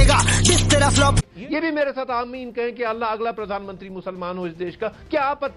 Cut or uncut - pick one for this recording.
cut